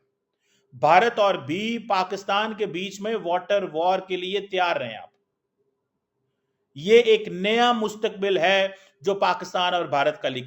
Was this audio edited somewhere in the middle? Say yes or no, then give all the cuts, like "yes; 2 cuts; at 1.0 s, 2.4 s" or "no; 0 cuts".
no; 0 cuts